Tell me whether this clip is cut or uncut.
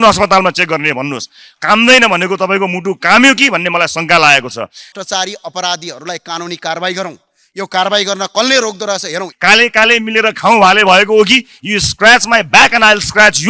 cut